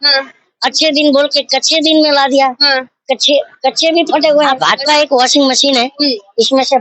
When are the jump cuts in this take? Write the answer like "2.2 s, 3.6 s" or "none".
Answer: 4.6 s